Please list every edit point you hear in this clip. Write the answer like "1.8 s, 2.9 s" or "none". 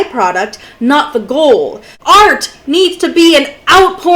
1.8 s